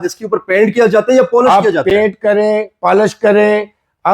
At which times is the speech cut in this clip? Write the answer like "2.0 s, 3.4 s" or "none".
none